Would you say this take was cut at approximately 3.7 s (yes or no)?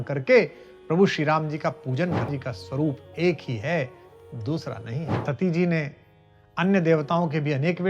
no